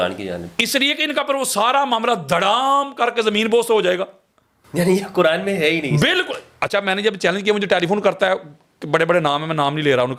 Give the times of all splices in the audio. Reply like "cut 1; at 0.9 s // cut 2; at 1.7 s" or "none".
none